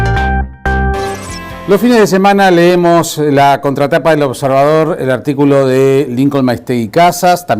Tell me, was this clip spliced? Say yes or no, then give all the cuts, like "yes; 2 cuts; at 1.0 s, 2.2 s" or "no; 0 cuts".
yes; 1 cut; at 1.0 s